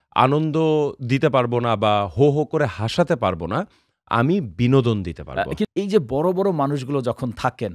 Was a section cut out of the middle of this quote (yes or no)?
yes